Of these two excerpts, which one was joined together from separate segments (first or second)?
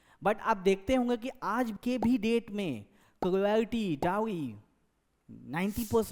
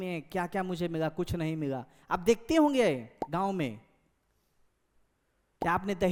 first